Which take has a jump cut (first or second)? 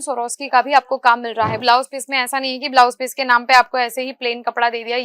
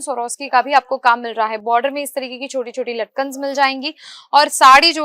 first